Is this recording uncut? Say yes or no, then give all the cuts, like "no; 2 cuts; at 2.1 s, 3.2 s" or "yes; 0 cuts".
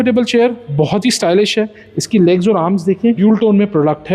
no; 1 cut; at 3.2 s